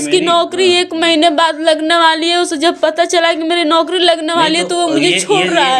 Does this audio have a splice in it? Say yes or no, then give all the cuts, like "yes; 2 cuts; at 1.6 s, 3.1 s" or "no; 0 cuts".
no; 0 cuts